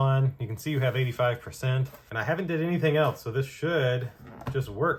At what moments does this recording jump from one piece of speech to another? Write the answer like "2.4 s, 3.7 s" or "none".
none